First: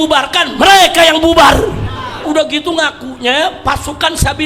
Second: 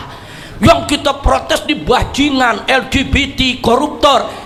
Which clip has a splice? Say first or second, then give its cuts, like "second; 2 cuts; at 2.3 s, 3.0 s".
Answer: first; 1 cut; at 2.2 s